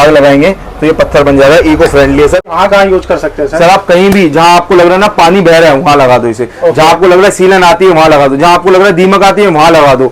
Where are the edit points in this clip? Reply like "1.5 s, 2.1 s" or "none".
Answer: 2.5 s